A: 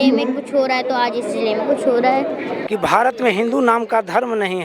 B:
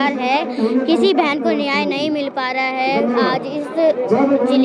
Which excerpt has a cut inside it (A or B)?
A